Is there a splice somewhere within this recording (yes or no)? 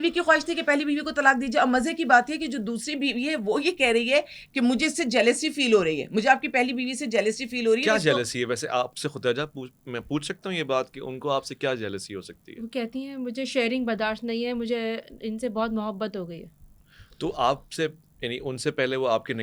no